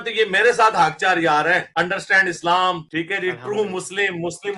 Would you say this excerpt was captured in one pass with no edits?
yes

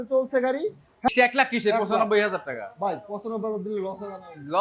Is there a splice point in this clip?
yes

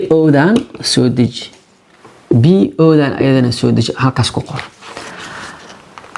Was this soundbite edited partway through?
no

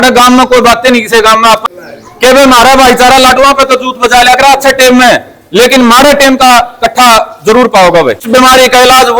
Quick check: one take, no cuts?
no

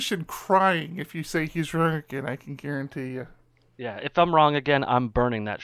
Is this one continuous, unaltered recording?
yes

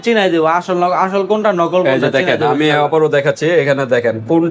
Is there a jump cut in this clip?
no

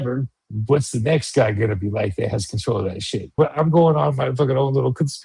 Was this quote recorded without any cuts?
no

